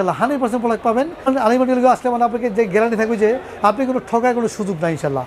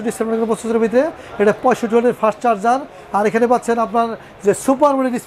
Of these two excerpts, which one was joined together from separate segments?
first; 1 cut; at 1.3 s

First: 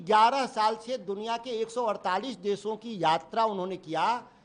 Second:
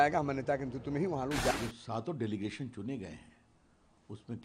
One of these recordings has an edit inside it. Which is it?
second; 1 cut; at 1.5 s

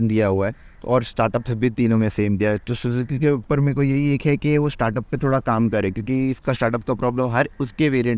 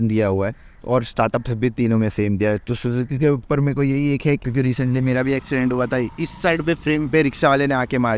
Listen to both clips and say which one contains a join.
second; 1 cut; at 4.4 s

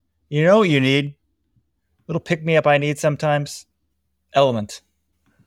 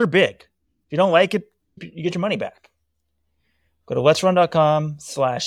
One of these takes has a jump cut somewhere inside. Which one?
second; 1 cut; at 1.9 s

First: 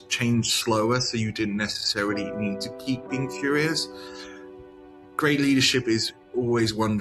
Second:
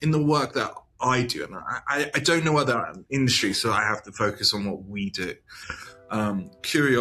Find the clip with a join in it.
first; 1 cut; at 6.1 s

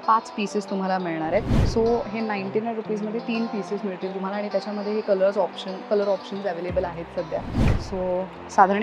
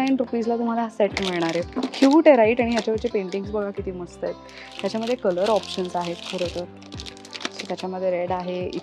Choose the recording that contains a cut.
first; 2 cuts; at 1.6 s, 7.8 s

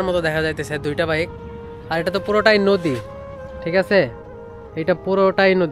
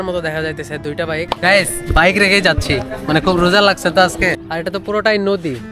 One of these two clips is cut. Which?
second; 2 cuts; at 1.3 s, 4.5 s

